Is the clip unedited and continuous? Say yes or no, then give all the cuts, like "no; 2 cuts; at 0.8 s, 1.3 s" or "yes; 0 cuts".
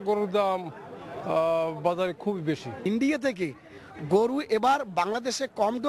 no; 1 cut; at 2.7 s